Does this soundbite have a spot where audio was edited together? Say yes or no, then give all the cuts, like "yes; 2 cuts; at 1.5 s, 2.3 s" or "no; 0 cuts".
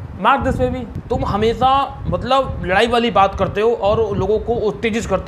yes; 1 cut; at 0.9 s